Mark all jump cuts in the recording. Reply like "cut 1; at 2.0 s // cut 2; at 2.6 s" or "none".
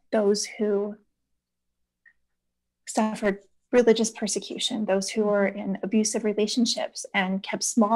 none